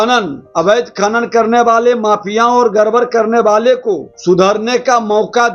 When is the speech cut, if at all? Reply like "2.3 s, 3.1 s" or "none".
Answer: 4.1 s